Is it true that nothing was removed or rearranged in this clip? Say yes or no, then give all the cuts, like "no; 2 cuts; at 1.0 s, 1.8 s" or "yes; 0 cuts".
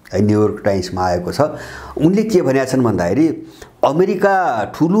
yes; 0 cuts